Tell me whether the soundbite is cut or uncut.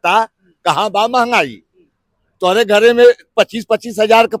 uncut